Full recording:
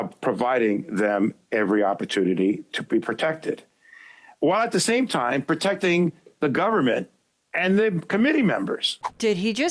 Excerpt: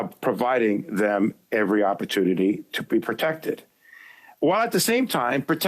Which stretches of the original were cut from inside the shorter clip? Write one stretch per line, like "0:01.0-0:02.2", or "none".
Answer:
none